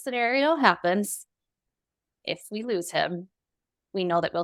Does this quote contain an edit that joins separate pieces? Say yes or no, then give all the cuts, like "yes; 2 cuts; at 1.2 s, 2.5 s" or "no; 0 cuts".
no; 0 cuts